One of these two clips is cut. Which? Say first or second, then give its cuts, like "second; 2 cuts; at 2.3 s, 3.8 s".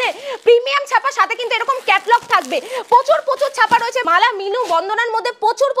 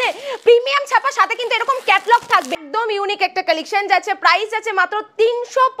second; 1 cut; at 2.6 s